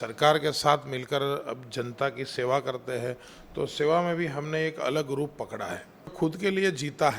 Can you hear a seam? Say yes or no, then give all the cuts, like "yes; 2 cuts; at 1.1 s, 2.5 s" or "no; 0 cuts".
yes; 1 cut; at 6.1 s